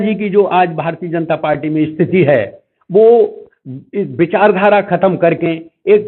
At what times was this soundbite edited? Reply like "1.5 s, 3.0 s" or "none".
none